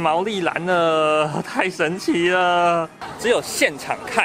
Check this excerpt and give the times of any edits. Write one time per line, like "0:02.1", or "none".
0:03.0